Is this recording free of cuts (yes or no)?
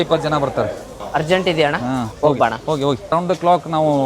no